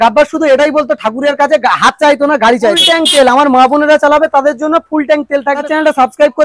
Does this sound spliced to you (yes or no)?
yes